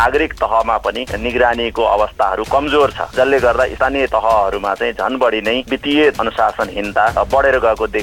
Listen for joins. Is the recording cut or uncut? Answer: cut